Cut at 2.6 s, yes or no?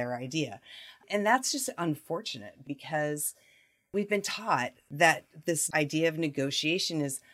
yes